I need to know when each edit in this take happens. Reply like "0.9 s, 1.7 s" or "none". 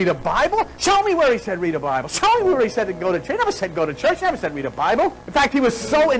5.1 s